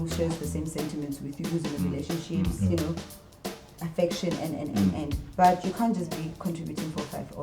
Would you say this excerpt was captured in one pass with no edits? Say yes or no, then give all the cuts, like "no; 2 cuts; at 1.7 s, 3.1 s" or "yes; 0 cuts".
yes; 0 cuts